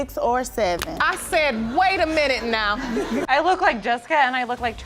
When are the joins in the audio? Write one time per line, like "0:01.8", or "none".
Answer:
0:03.2